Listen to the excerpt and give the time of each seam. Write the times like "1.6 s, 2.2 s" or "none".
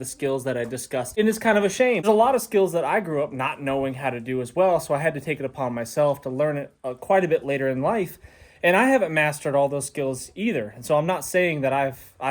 1.1 s, 2.0 s